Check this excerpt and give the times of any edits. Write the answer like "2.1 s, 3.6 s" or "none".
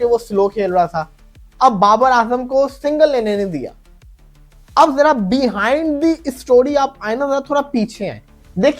none